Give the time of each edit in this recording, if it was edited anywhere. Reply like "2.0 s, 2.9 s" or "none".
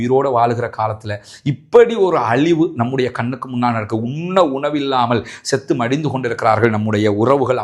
none